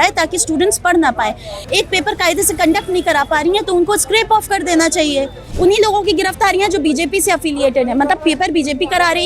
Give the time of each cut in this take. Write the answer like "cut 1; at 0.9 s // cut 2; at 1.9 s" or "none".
cut 1; at 1.5 s // cut 2; at 5.4 s